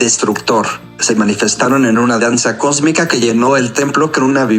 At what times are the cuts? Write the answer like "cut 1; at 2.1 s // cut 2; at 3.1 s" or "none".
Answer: none